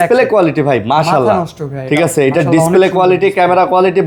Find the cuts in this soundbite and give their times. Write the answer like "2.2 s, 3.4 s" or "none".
none